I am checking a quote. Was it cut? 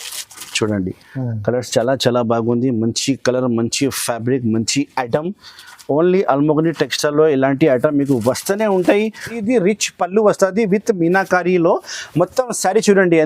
yes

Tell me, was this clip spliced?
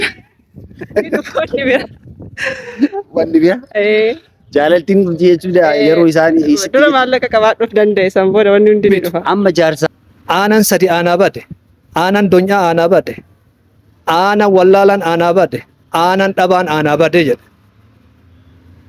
yes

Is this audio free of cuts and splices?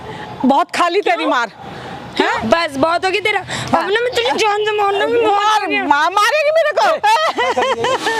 no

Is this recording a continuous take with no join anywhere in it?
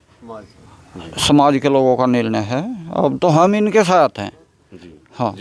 yes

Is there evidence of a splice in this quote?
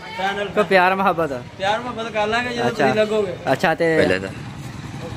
yes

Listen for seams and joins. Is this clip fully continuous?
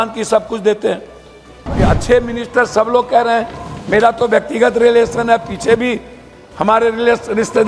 no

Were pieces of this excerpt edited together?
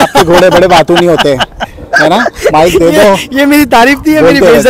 no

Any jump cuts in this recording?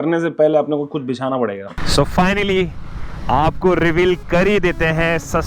yes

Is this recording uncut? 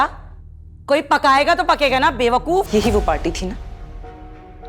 no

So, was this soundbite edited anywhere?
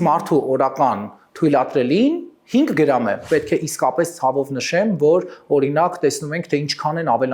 yes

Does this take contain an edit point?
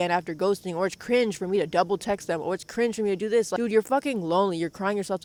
no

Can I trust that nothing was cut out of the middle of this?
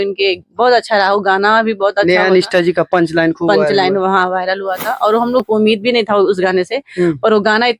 no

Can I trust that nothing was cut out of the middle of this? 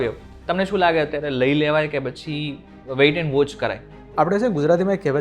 no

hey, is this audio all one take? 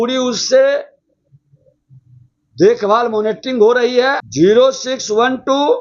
no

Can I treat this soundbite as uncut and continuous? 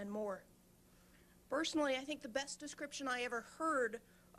no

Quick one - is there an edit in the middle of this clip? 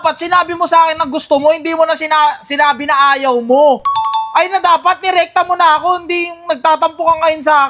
no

